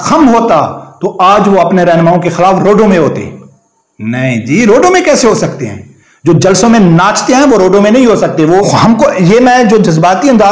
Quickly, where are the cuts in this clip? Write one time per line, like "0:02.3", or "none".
0:08.7